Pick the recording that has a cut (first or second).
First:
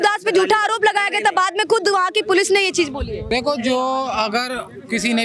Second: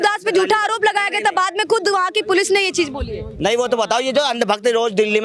first